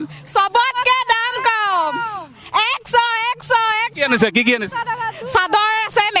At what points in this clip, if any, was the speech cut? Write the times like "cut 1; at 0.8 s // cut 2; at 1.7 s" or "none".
none

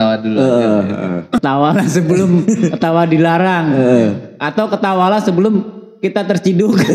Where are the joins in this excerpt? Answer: cut 1; at 1.4 s

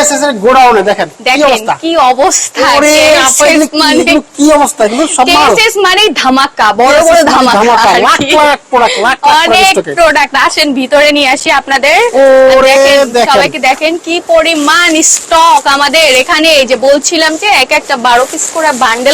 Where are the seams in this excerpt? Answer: none

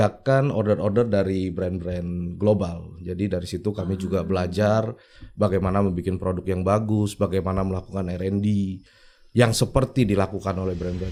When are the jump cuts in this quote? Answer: none

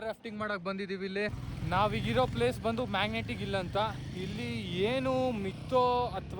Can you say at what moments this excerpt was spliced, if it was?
cut 1; at 1.3 s

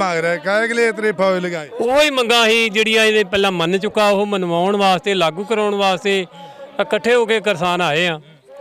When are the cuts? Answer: cut 1; at 1.6 s

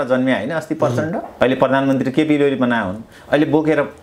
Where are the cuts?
cut 1; at 1.3 s

